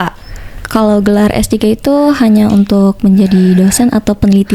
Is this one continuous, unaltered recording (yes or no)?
yes